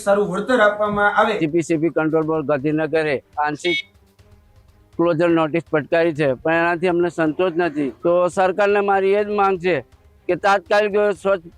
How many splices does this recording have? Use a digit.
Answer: 2